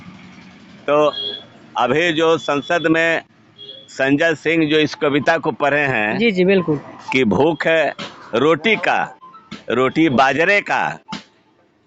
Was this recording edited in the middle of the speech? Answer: no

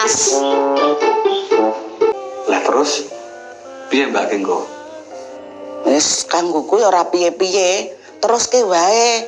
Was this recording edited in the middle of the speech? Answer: yes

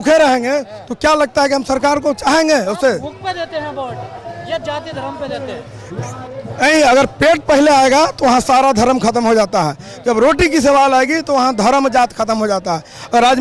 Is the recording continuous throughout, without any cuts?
yes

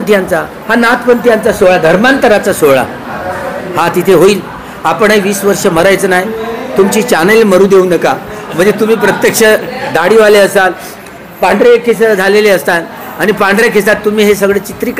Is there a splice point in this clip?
no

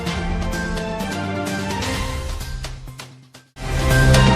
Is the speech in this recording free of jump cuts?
yes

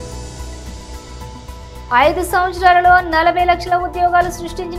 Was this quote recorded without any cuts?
no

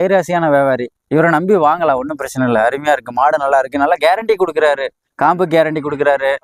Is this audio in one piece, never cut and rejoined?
yes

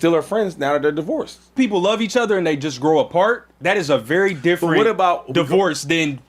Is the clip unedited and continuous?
no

